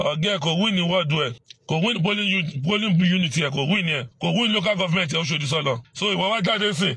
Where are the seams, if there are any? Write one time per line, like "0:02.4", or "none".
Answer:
0:01.5
0:04.1
0:05.9